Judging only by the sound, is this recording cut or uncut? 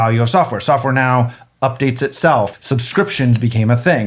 cut